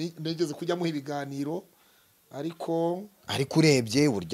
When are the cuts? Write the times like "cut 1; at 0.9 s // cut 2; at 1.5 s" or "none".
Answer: none